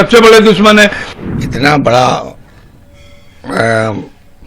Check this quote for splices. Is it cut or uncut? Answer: cut